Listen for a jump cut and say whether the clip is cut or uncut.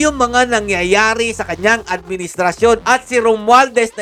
uncut